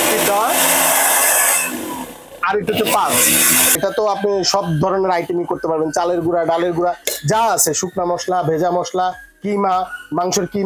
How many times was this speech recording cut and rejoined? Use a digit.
1